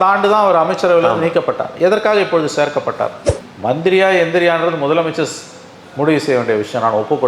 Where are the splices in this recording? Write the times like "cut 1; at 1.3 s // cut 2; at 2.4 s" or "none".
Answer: cut 1; at 3.2 s